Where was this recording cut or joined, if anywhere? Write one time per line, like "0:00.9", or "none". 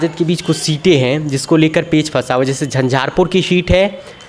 none